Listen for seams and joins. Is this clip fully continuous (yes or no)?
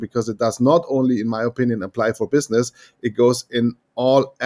yes